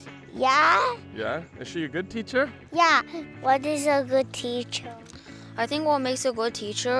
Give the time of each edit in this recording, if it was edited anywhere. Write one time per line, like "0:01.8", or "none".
0:03.2

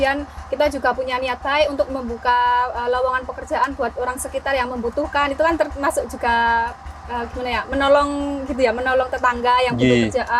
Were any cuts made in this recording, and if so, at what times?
none

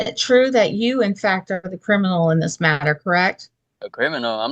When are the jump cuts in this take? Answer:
none

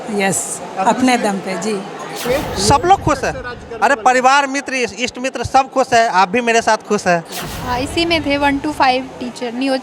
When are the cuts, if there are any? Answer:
0:02.2
0:07.5

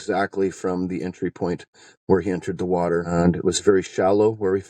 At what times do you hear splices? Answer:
0:03.1

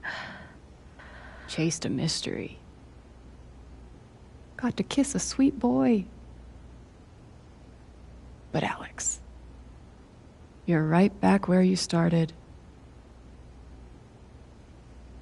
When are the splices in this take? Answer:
0:02.5
0:04.2
0:12.4
0:14.2

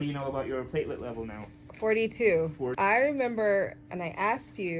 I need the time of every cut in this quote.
0:02.7

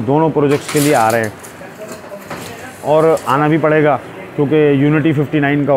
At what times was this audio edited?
none

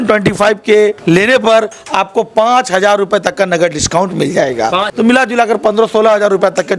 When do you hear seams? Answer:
0:01.0
0:04.9

